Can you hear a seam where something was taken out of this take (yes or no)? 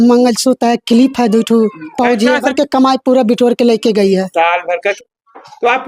yes